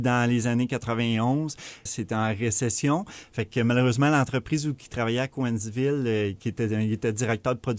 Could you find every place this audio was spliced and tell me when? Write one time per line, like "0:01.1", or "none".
0:01.9